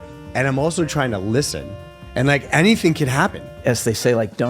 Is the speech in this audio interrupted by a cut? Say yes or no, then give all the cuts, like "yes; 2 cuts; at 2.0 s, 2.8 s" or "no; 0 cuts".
yes; 1 cut; at 3.6 s